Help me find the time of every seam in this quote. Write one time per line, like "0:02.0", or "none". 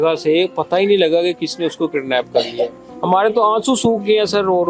0:02.9